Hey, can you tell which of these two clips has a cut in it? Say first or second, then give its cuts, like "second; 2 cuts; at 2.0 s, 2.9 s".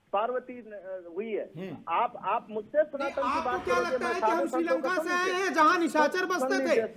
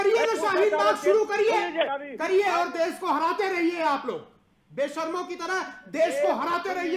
second; 1 cut; at 2.0 s